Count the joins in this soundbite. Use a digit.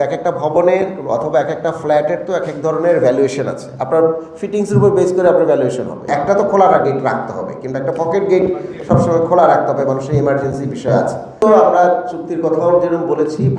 2